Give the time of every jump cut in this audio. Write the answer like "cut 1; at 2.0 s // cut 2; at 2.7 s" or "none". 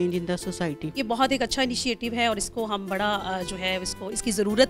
cut 1; at 1.0 s